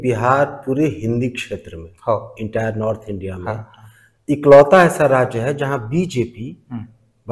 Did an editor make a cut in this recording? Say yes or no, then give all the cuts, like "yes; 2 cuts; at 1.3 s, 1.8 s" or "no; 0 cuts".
no; 0 cuts